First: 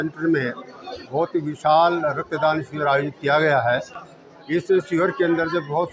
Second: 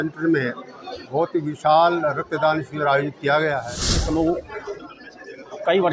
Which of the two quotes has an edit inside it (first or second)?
second